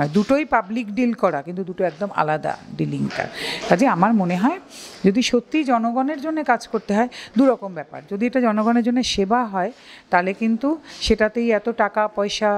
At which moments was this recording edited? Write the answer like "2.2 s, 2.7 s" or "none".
none

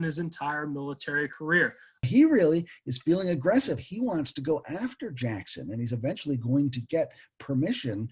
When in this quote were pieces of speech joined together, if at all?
2.1 s

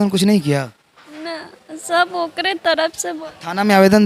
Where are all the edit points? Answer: none

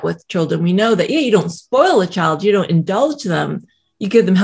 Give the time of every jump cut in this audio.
none

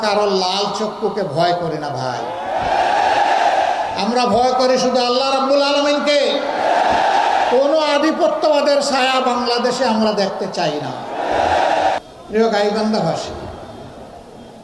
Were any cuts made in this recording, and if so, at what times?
12.0 s

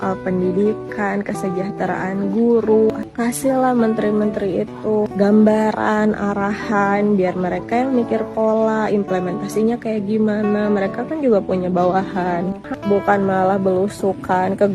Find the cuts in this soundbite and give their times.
3.0 s, 12.6 s

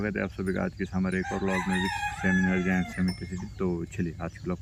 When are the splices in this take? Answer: none

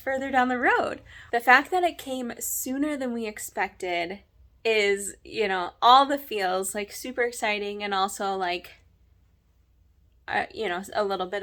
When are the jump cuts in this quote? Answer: none

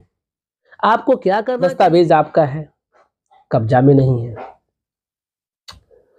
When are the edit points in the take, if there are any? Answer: 1.5 s

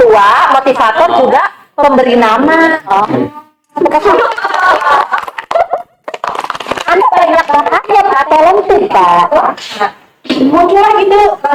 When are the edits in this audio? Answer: 9.3 s

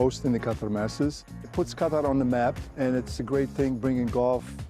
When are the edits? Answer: 1.3 s, 3.0 s

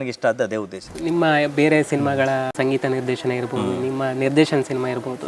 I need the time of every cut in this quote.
0.9 s, 2.5 s

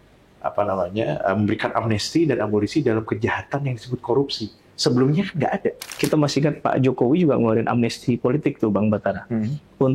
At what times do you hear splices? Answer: 5.9 s

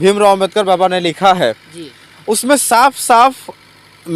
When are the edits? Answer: none

